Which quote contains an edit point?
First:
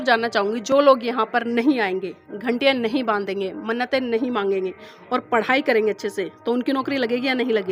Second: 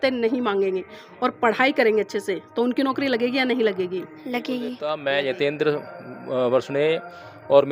second; 1 cut; at 4.9 s

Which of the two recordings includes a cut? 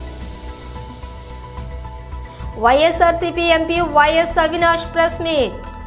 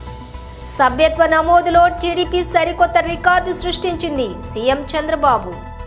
first; 1 cut; at 1.1 s

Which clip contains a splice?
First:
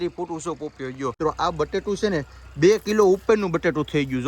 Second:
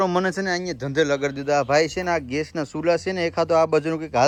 first; 1 cut; at 1.2 s

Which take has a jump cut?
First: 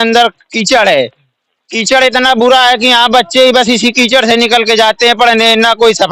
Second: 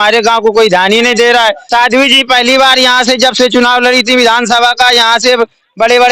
second; 1 cut; at 1.6 s

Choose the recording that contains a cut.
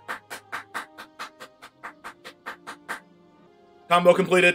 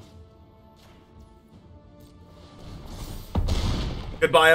first; 1 cut; at 3.5 s

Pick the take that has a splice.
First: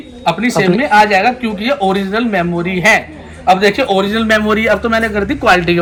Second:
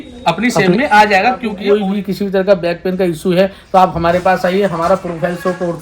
second; 1 cut; at 1.5 s

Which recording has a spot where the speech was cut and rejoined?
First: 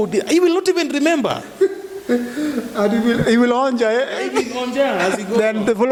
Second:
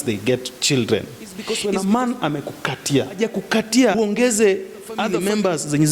second; 4 cuts; at 1.5 s, 3.2 s, 4.0 s, 5.1 s

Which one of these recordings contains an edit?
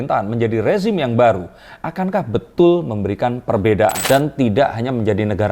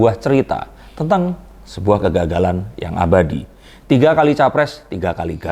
first; 1 cut; at 4.0 s

